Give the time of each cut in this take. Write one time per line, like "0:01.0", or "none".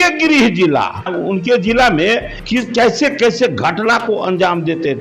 0:01.1
0:02.4